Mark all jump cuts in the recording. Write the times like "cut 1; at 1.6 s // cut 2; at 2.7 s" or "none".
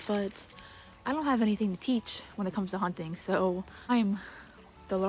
cut 1; at 3.9 s